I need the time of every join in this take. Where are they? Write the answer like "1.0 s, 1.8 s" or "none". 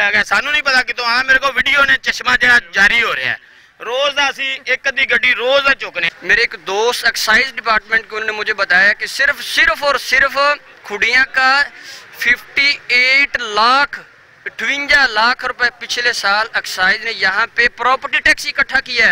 6.1 s